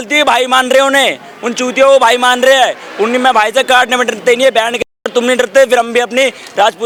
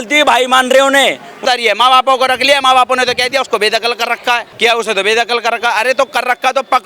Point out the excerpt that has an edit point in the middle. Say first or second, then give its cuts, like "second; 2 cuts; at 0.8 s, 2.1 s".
second; 2 cuts; at 1.3 s, 4.5 s